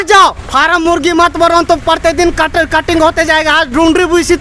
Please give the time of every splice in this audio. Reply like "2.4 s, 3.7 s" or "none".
none

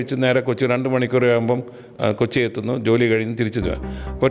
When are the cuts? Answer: none

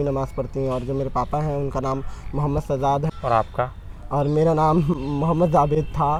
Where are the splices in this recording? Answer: none

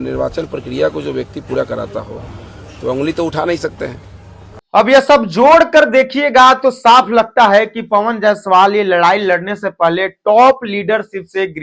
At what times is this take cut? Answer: 4.7 s

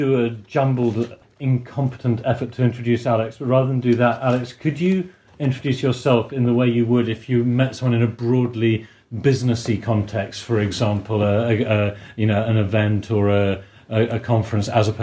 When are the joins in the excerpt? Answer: 1.2 s

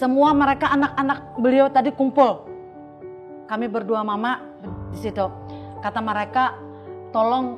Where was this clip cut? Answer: none

